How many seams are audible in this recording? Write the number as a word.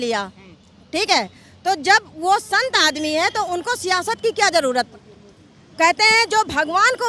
one